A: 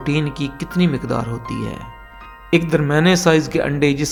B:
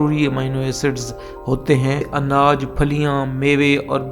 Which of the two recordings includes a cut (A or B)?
B